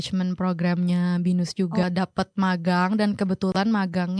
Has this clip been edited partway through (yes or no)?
yes